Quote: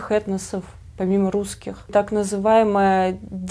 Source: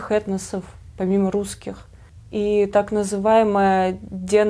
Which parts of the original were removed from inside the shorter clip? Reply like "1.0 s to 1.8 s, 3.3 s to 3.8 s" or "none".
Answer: 1.9 s to 2.7 s